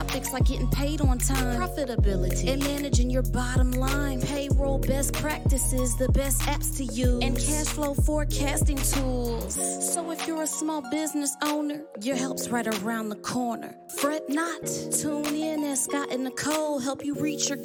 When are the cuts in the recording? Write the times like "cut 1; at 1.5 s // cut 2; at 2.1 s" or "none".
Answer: none